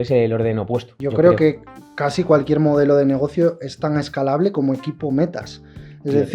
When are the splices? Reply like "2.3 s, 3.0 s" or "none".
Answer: 1.0 s